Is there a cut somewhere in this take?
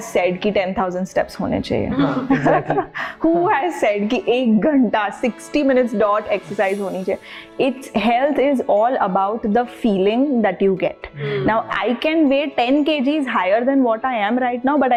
no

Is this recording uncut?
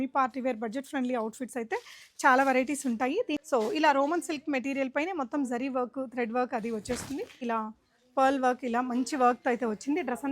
no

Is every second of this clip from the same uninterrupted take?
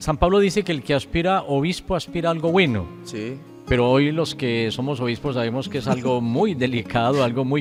yes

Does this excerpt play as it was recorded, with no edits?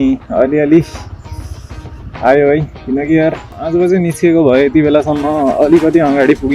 no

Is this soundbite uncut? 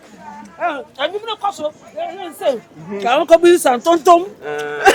yes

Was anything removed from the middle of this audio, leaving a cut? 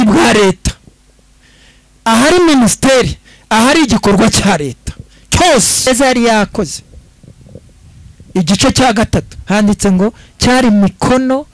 yes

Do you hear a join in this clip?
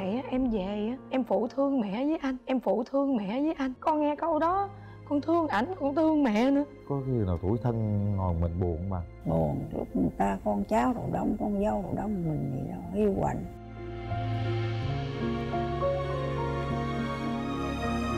yes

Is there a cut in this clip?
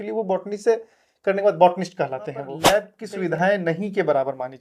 yes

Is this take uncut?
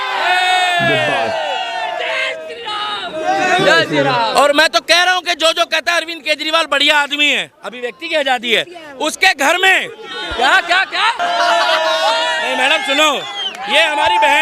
no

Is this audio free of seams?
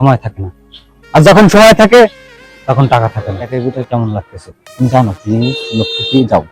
no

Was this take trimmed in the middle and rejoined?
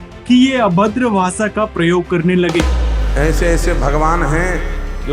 no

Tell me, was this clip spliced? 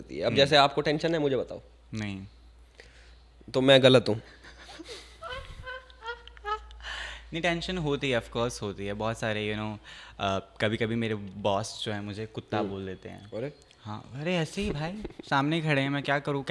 no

